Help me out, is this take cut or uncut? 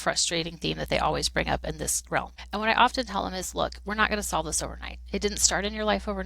cut